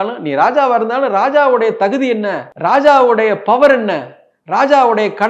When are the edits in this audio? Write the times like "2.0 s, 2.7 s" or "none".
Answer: 2.4 s